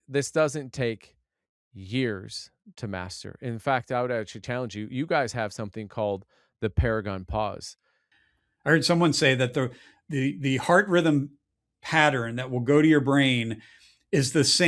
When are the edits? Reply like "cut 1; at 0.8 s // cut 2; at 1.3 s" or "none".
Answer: cut 1; at 8.0 s